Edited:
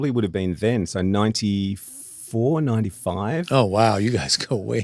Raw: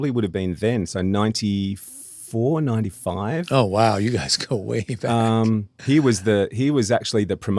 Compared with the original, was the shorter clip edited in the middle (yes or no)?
no